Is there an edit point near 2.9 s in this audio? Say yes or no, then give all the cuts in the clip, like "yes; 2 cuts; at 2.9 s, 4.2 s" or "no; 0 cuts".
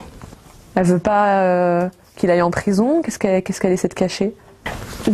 yes; 1 cut; at 2.9 s